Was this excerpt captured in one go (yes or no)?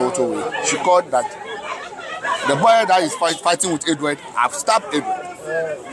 yes